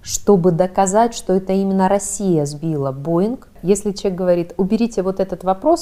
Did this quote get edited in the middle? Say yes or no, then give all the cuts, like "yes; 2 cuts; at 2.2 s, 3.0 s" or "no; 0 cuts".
yes; 1 cut; at 3.5 s